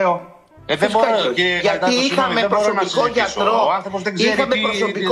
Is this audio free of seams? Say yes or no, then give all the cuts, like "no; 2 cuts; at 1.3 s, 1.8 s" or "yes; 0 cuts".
yes; 0 cuts